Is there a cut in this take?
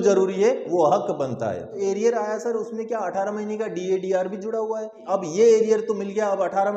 yes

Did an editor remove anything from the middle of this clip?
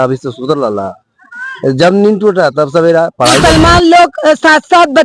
yes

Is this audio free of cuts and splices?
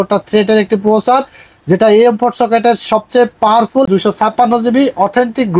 no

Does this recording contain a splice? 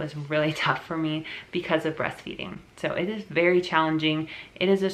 no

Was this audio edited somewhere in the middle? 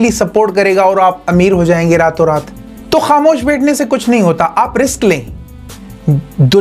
yes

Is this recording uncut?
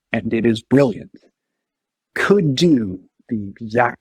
no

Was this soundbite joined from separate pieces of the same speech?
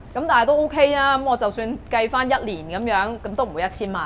no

